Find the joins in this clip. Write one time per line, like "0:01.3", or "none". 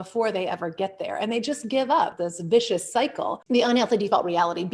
0:02.2
0:03.4